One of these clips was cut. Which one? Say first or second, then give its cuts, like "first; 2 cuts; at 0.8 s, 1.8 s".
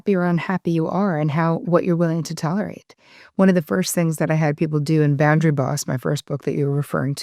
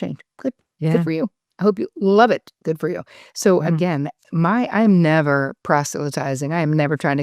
first; 1 cut; at 1.6 s